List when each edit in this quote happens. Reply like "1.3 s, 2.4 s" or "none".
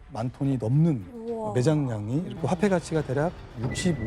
2.3 s

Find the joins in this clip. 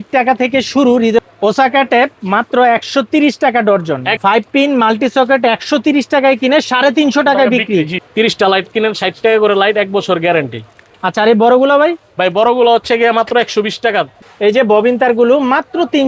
1.2 s, 4.1 s, 8.0 s, 10.8 s, 14.2 s

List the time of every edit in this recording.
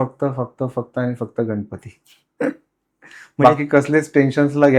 none

